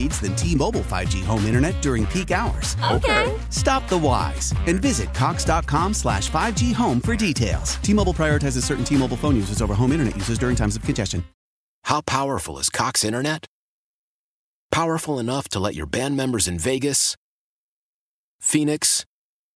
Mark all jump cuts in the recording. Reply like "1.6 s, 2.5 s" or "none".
11.3 s